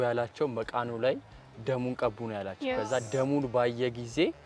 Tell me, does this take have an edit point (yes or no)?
no